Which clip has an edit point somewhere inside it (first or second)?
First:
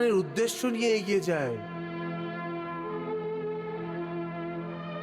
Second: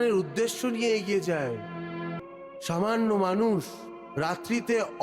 second